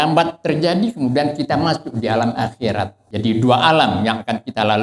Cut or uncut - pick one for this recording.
cut